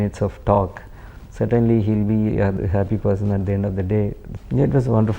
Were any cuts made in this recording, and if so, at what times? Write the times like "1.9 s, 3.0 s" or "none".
2.5 s, 4.3 s